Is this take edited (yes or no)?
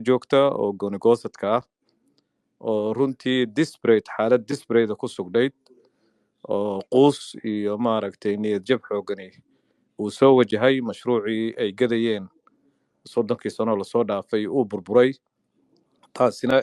no